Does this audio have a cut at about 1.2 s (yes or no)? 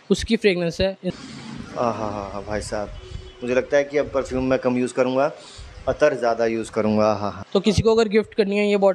yes